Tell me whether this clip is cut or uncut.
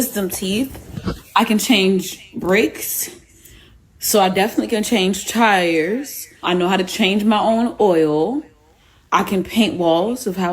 cut